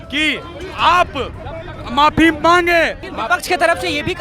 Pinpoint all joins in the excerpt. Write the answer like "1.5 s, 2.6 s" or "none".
3.0 s

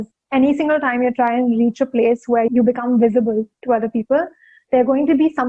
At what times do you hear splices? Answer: 2.5 s

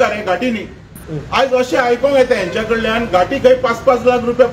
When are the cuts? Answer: none

